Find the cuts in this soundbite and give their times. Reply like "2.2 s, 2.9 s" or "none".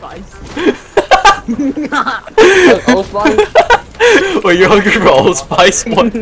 4.2 s

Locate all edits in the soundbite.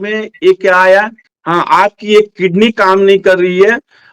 1.2 s

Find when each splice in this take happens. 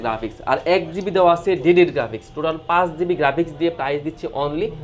none

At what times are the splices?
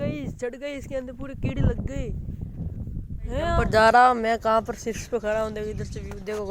3.6 s

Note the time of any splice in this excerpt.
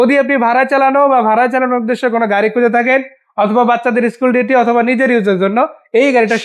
none

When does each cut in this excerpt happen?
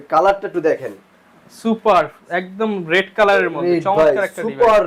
none

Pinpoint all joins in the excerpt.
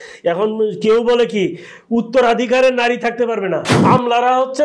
3.7 s

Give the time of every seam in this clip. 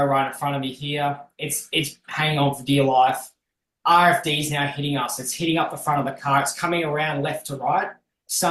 none

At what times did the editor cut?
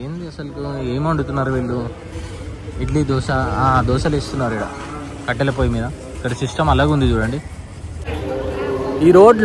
none

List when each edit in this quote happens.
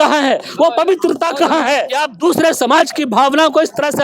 2.0 s

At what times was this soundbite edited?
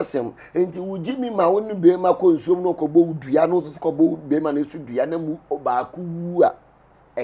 none

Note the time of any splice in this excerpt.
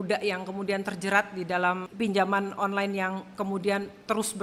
none

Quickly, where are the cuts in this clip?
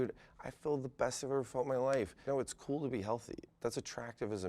2.2 s, 3.5 s

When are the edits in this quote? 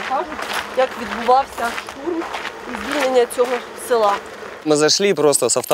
4.7 s

